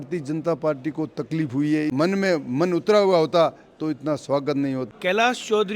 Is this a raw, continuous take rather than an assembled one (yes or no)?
no